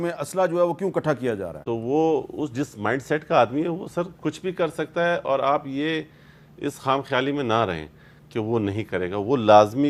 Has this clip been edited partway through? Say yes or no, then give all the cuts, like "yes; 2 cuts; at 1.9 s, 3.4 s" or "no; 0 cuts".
no; 0 cuts